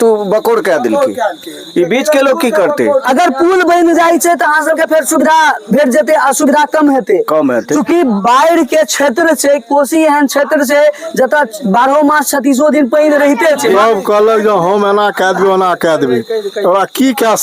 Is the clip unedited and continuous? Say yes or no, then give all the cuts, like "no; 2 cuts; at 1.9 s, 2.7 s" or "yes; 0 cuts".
no; 2 cuts; at 3.0 s, 13.8 s